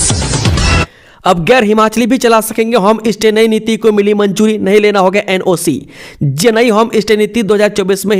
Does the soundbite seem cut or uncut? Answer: cut